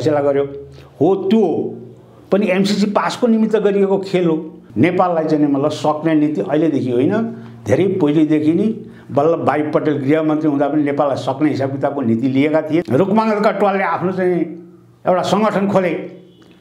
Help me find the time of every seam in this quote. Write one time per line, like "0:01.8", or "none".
0:04.6
0:12.9